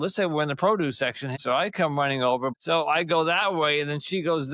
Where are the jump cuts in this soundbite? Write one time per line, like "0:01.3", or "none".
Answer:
0:01.4
0:02.6